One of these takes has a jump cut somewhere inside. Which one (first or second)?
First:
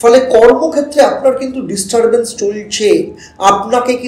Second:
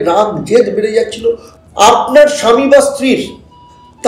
second